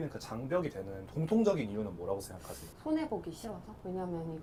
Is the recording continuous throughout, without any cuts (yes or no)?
yes